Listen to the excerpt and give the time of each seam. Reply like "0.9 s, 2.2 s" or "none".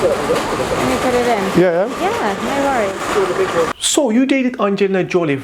3.7 s